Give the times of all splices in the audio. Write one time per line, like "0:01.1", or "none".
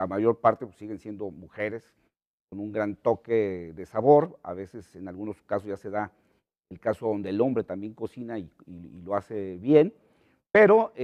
none